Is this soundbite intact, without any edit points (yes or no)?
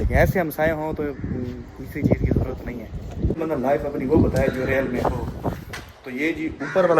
no